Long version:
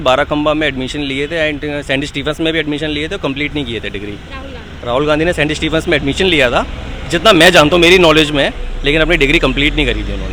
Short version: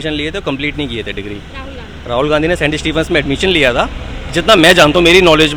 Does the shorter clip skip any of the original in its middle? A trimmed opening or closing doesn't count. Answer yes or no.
no